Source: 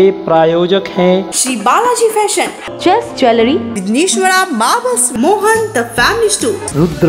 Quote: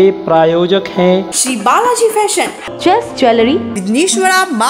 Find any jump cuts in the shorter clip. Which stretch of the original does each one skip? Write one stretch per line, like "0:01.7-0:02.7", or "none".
none